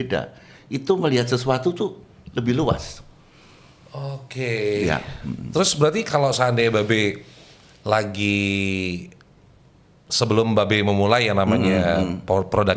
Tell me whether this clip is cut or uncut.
uncut